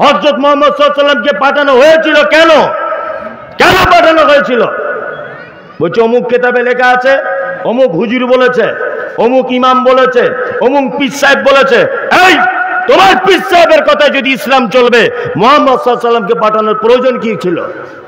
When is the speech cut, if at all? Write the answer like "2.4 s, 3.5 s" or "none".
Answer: none